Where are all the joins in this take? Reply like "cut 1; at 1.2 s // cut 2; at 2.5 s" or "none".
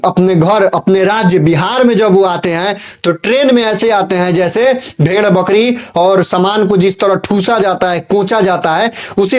none